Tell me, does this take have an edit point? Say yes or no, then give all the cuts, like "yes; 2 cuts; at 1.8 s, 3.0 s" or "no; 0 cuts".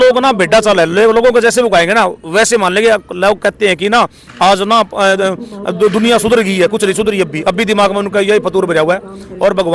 no; 0 cuts